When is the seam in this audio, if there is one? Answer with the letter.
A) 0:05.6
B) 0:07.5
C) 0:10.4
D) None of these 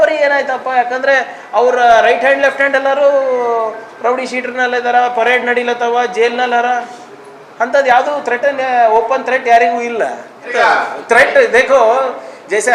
C